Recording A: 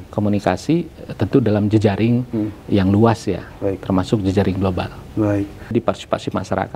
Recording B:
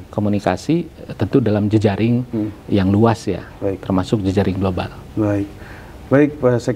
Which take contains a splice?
A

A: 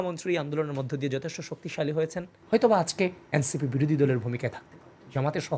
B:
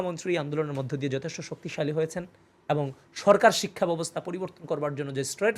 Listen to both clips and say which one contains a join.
A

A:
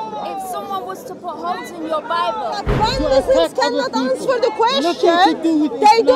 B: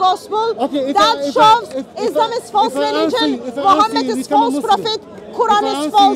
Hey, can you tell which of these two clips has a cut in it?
A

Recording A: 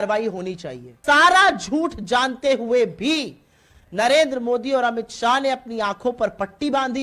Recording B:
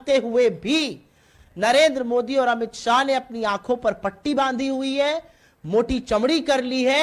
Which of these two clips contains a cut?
A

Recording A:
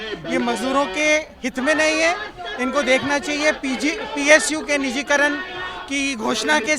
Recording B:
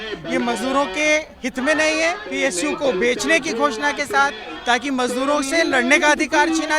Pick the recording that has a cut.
B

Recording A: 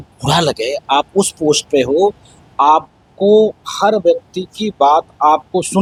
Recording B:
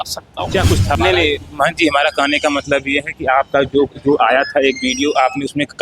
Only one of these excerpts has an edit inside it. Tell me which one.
B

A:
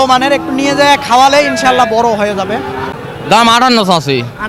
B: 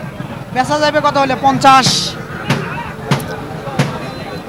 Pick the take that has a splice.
A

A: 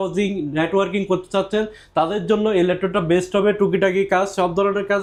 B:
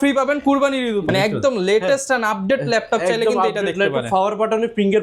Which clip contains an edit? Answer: B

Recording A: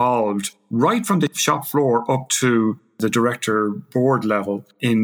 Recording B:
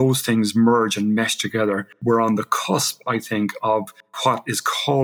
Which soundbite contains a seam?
A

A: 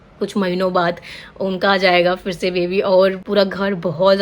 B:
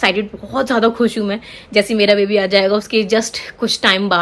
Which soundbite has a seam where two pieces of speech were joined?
A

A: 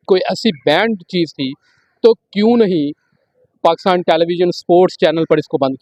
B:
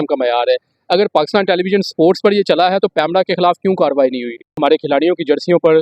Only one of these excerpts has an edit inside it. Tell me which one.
B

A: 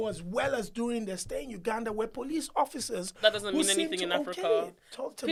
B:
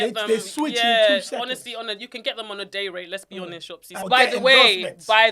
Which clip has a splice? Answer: B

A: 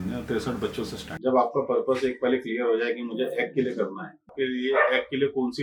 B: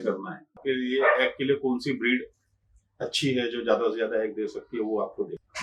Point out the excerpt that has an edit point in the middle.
A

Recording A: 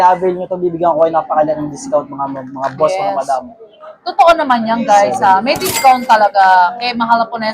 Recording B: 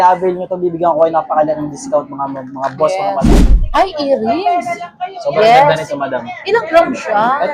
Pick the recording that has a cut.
B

